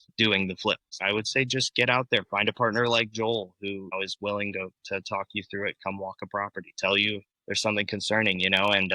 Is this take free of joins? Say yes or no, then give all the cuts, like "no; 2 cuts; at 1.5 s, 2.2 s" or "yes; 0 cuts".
no; 3 cuts; at 1.0 s, 3.9 s, 7.3 s